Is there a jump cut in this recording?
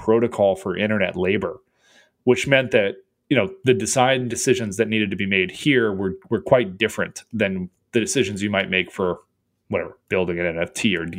no; 0 cuts

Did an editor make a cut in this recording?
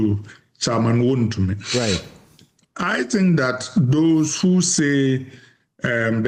no; 0 cuts

